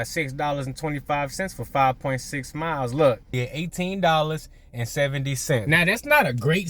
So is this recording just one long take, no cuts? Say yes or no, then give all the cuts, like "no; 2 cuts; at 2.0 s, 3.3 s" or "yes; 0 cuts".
no; 2 cuts; at 3.4 s, 5.6 s